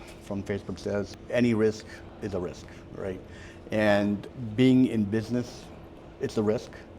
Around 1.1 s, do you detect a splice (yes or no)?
yes